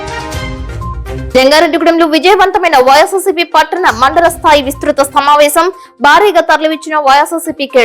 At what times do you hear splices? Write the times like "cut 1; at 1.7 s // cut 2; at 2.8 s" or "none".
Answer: cut 1; at 0.9 s